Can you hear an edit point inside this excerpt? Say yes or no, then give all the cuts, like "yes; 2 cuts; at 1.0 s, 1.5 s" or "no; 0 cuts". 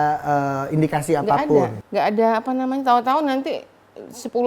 yes; 1 cut; at 1.8 s